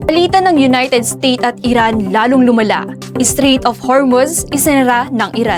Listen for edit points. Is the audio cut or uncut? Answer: uncut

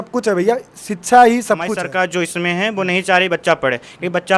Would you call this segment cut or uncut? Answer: cut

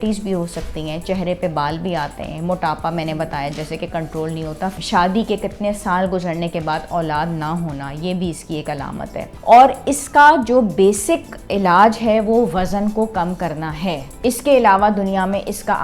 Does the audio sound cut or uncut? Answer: cut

